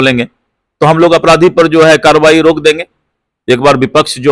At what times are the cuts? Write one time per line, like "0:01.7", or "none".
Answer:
none